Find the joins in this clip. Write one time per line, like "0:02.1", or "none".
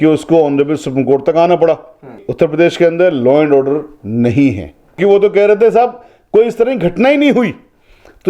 0:02.2
0:05.0